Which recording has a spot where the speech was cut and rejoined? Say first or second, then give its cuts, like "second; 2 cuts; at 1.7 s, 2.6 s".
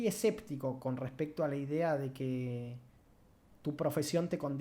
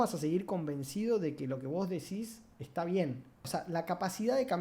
second; 1 cut; at 3.5 s